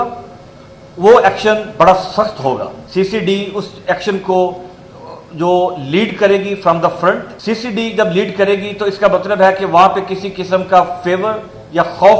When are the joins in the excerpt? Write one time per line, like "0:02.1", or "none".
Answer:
0:02.8
0:07.3